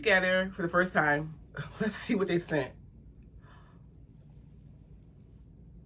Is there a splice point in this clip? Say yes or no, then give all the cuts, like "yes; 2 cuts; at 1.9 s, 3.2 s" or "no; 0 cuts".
no; 0 cuts